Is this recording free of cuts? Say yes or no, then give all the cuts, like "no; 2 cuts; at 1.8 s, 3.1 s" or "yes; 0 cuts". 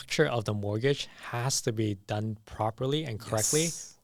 yes; 0 cuts